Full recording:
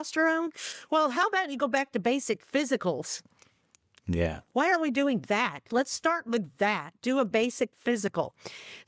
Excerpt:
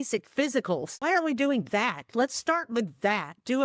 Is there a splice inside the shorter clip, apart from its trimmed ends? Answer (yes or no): yes